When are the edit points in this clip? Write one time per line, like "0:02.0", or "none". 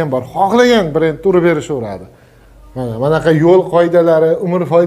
none